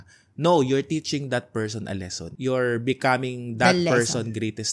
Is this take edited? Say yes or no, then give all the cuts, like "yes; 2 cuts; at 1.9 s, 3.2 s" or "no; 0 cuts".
yes; 1 cut; at 2.2 s